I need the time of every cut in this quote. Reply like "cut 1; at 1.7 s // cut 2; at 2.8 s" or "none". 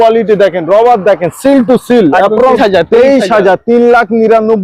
cut 1; at 2.6 s